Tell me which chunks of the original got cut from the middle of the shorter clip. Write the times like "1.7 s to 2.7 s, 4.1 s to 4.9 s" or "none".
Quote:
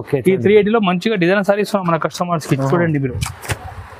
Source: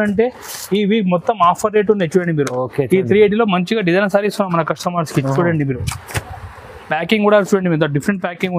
none